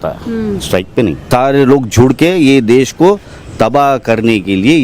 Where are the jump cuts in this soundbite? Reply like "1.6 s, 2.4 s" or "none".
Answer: 1.2 s